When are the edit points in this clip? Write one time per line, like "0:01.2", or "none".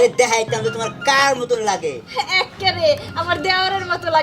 none